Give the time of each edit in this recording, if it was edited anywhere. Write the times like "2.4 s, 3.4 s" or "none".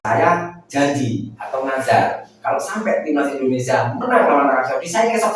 none